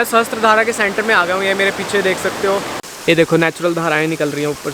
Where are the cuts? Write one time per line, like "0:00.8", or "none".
0:02.8